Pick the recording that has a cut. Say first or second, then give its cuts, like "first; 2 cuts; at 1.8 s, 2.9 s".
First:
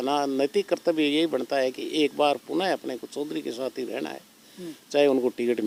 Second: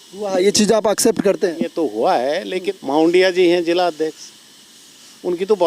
second; 1 cut; at 2.7 s